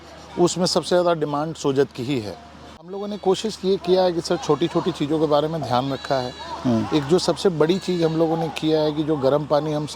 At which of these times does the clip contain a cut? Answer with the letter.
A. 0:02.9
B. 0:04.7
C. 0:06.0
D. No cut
A